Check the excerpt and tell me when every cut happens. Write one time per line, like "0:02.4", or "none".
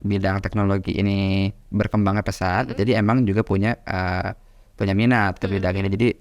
none